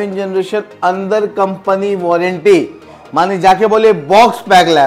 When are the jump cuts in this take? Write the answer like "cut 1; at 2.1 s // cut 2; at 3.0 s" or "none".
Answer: none